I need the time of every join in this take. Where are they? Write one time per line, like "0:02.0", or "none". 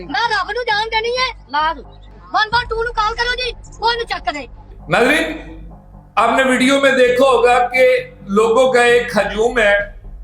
0:02.0
0:04.6